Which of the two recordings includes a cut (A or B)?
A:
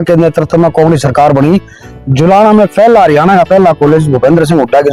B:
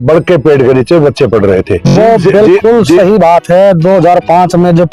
B